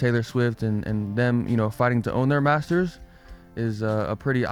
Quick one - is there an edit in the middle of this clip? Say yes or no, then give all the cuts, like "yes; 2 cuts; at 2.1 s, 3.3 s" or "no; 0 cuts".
no; 0 cuts